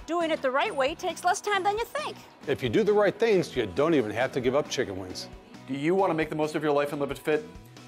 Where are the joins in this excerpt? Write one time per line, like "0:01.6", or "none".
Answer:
none